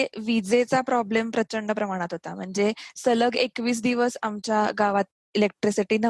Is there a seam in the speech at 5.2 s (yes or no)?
yes